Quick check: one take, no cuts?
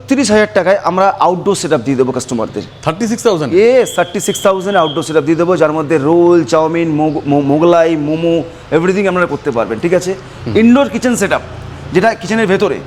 yes; 0 cuts

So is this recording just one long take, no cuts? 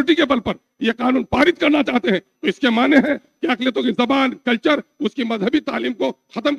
yes; 0 cuts

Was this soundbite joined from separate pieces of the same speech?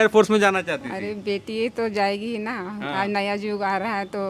no; 0 cuts

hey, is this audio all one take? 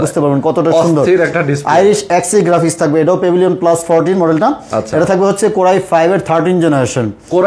yes; 0 cuts

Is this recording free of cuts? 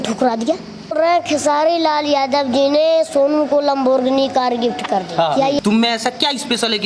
no; 2 cuts; at 0.9 s, 5.6 s

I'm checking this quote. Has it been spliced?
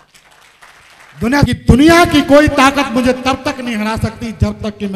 yes; 1 cut; at 1.5 s

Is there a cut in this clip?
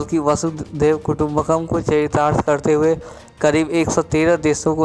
no; 0 cuts

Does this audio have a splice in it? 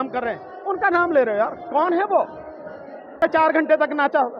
yes; 1 cut; at 3.2 s

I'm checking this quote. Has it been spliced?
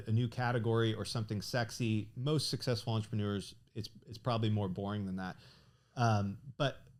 no; 0 cuts

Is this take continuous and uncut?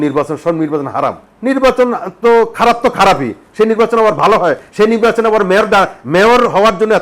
no; 1 cut; at 1.3 s

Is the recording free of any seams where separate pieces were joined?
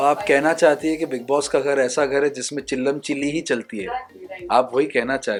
yes; 0 cuts

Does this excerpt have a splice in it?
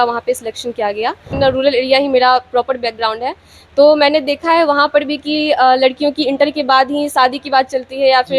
yes; 1 cut; at 1.3 s

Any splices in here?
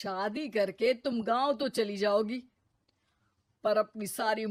no; 0 cuts

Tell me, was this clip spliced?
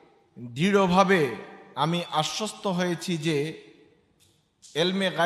no; 0 cuts

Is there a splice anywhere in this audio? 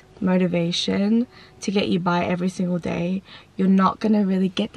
no; 0 cuts

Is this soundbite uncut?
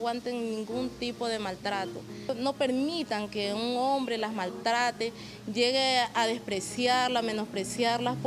yes; 0 cuts

